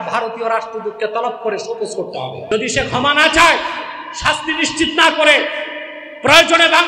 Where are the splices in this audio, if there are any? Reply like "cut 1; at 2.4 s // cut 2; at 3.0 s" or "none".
cut 1; at 2.4 s